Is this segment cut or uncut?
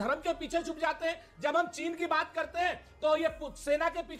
uncut